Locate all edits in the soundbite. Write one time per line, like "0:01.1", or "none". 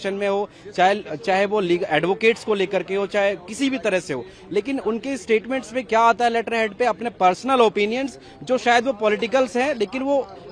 none